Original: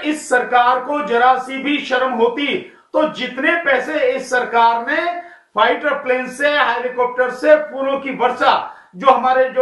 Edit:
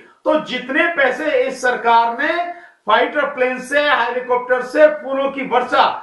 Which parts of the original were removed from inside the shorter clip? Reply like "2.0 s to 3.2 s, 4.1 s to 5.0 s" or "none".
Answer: none